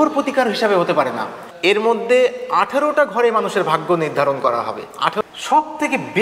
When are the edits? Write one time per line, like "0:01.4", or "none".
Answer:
0:01.4
0:05.2